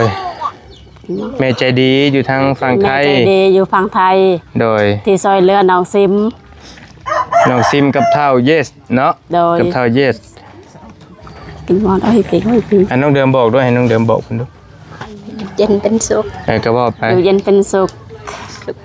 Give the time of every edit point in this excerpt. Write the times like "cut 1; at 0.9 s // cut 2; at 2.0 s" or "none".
none